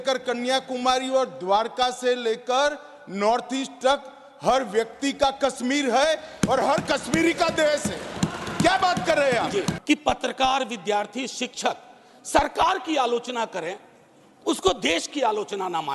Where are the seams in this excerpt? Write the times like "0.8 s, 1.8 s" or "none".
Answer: 9.8 s